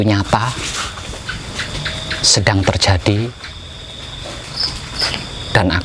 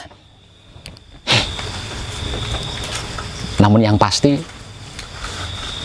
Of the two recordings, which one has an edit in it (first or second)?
second